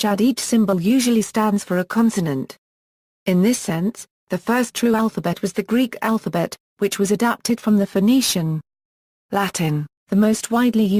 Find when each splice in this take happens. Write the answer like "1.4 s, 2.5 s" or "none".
6.8 s